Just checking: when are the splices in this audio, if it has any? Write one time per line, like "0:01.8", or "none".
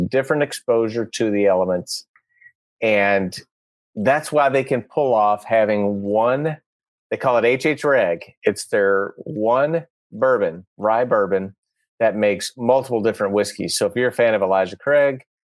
none